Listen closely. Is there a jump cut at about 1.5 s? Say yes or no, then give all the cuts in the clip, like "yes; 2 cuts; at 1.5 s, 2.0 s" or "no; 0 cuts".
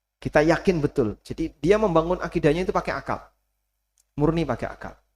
no; 0 cuts